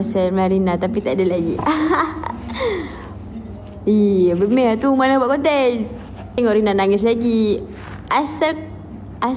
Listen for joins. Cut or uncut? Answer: cut